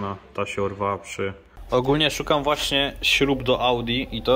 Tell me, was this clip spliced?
yes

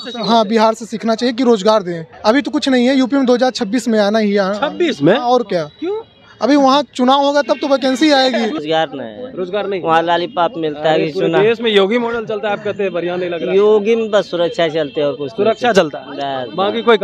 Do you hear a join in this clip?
yes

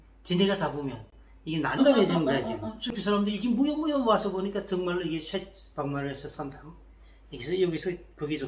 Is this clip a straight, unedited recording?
no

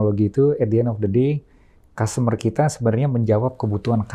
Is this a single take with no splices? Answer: yes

